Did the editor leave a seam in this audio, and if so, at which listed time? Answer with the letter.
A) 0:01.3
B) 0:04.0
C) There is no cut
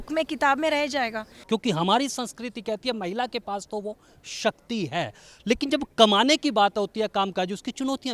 A